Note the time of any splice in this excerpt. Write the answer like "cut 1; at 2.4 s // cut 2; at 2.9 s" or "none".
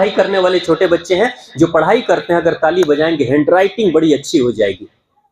none